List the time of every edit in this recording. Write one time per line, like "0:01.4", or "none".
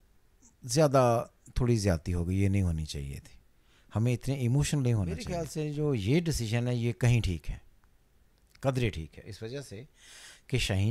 0:05.2